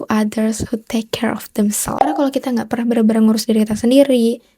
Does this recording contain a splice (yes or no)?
yes